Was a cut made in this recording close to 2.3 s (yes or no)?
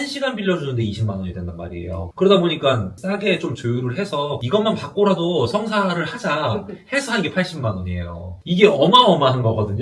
no